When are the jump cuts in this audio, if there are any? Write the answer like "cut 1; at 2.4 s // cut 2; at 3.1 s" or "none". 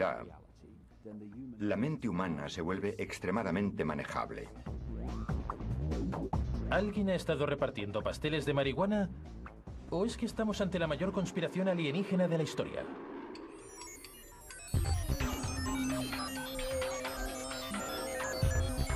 none